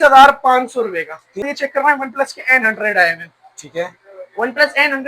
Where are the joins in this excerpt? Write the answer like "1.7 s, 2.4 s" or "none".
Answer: 1.4 s